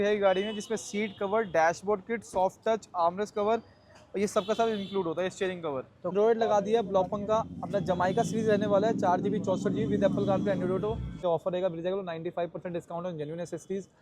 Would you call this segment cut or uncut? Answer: cut